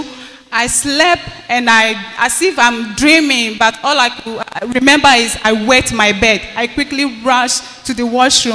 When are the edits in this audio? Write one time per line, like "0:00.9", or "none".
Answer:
none

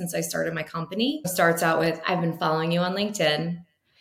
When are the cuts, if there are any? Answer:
0:01.3

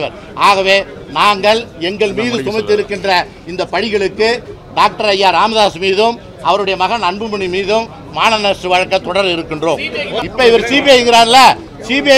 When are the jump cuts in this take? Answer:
0:10.2

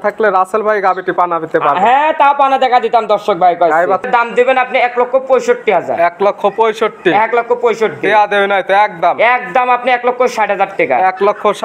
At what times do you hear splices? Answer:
0:04.1

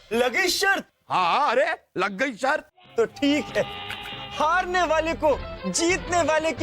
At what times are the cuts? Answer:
0:00.9

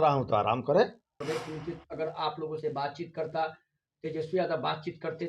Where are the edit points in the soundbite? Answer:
0:01.2

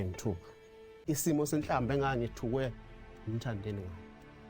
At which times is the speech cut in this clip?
0:01.0

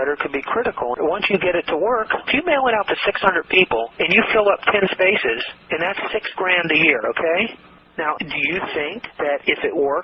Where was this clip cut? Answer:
0:05.6
0:07.8

